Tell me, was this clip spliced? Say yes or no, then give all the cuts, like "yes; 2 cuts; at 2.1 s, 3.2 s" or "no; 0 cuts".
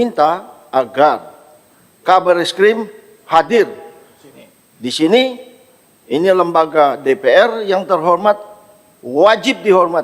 no; 0 cuts